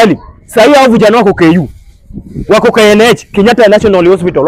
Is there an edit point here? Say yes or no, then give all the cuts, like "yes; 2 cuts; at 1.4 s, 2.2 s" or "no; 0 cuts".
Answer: no; 0 cuts